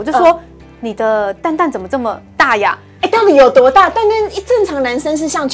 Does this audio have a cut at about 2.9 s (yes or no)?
no